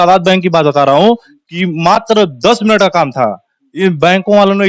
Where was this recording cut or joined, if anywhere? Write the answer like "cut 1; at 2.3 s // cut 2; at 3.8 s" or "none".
none